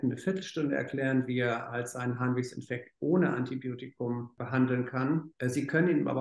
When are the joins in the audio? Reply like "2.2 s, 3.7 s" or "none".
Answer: 4.3 s, 5.3 s